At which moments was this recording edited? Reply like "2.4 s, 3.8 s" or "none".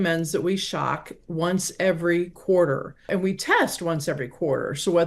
3.1 s

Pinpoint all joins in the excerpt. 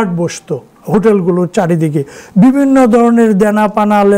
none

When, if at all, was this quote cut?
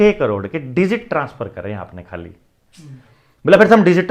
none

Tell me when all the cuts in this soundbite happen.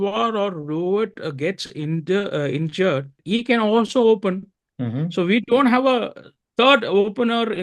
3.2 s

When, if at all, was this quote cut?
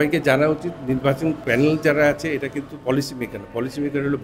1.4 s

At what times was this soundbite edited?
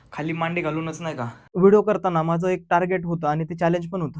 1.5 s

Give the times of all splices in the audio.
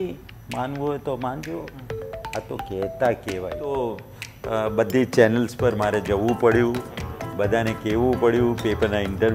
3.7 s

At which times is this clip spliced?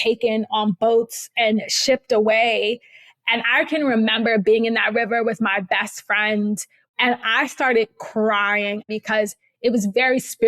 6.8 s, 8.9 s

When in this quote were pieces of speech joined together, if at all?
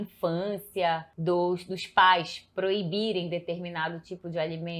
1.1 s

